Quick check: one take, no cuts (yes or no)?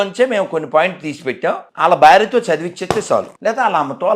no